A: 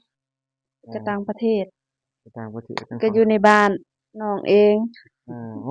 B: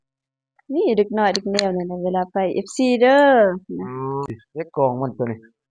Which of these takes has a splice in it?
B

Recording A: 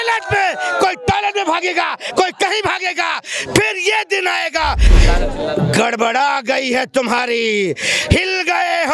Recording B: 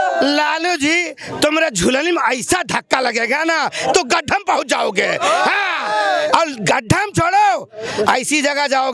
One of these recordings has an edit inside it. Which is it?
A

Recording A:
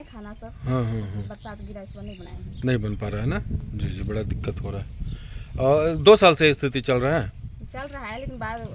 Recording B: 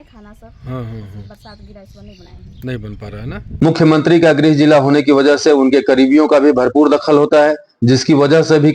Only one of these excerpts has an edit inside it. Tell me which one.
B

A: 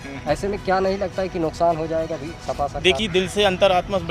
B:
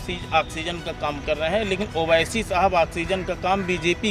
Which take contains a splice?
A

